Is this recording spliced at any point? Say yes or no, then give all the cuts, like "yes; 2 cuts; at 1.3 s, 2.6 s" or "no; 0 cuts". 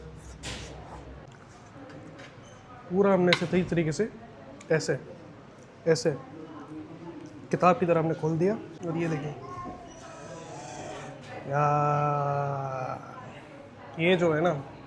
yes; 2 cuts; at 1.2 s, 8.7 s